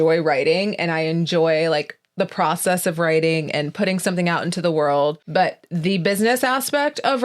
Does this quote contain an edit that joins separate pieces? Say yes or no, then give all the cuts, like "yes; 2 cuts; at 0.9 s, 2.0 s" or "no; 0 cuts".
yes; 1 cut; at 5.2 s